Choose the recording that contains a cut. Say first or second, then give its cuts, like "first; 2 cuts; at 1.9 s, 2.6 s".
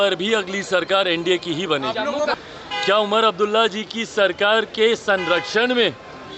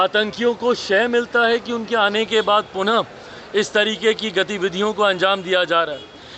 first; 1 cut; at 2.3 s